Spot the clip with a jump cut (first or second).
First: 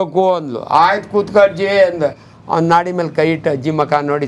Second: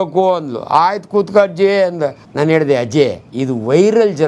second